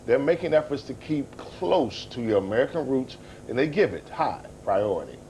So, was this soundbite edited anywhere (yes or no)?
no